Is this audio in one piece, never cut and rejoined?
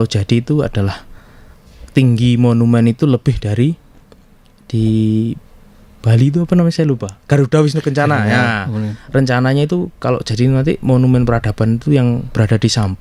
yes; 0 cuts

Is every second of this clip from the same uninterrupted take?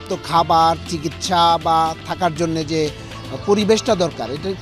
yes; 0 cuts

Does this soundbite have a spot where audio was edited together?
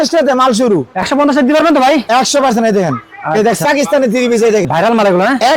yes; 3 cuts; at 1.1 s, 3.6 s, 4.7 s

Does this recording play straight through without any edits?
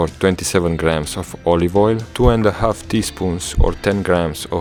yes; 0 cuts

